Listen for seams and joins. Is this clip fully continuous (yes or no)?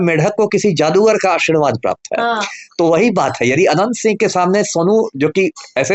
yes